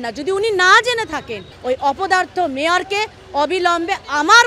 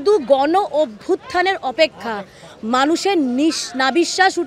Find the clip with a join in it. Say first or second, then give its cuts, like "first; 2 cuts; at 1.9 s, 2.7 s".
first; 1 cut; at 1.5 s